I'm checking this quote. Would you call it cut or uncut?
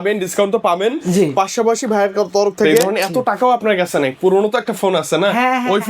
cut